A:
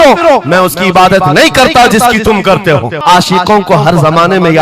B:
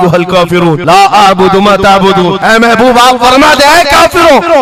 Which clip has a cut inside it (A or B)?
A